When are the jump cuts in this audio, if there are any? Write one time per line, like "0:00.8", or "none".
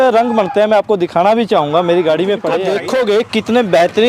0:02.6